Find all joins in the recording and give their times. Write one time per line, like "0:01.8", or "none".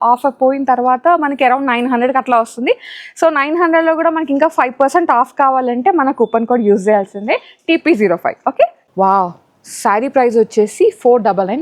0:08.8